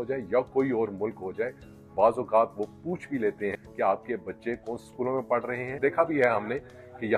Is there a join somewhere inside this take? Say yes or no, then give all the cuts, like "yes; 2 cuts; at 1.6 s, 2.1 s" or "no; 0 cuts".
yes; 3 cuts; at 1.7 s, 3.5 s, 5.7 s